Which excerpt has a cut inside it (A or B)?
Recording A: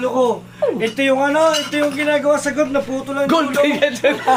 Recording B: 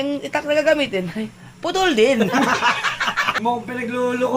B